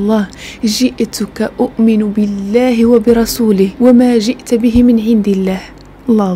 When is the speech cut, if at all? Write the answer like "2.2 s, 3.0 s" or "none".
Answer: none